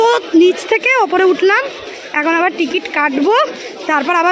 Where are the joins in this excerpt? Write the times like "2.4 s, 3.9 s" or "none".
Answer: none